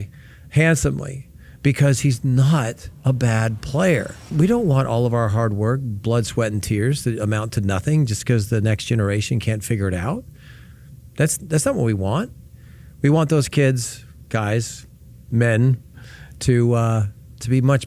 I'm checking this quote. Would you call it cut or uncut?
cut